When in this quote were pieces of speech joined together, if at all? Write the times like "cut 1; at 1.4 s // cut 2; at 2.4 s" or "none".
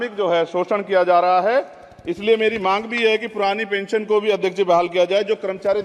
none